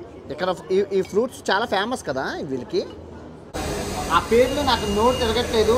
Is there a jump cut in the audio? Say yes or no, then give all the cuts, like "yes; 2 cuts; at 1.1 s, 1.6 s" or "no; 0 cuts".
yes; 1 cut; at 3.6 s